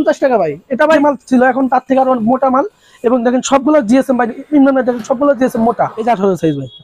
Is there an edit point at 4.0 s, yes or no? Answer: no